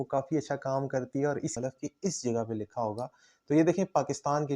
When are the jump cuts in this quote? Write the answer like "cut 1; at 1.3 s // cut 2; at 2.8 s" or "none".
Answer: cut 1; at 1.5 s